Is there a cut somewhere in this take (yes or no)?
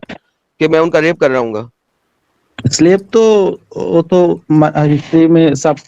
no